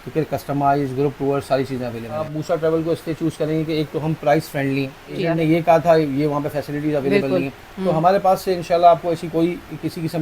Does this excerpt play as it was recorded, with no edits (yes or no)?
no